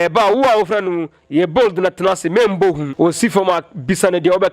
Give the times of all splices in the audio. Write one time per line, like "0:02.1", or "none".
0:02.9